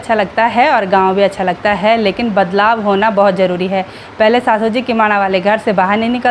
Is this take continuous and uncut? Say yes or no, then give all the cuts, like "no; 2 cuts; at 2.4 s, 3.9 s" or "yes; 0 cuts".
yes; 0 cuts